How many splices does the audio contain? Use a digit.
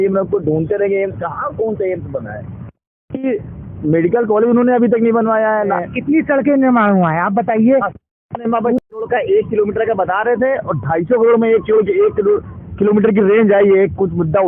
2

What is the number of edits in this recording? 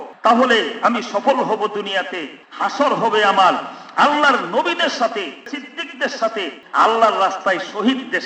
2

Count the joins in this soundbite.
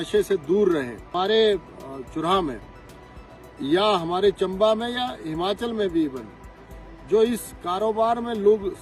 1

